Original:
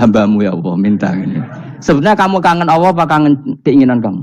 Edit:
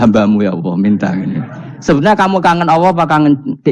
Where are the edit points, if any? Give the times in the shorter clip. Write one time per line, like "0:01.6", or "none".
none